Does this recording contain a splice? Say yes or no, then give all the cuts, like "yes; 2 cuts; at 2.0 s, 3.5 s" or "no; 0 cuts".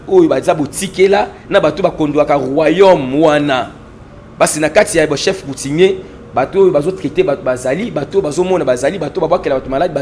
no; 0 cuts